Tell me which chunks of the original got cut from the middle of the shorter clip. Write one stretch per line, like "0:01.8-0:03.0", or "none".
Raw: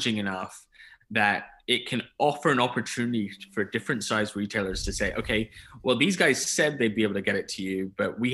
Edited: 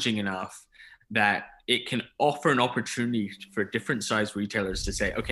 none